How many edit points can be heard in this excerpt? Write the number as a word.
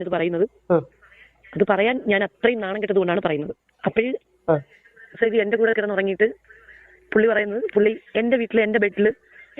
one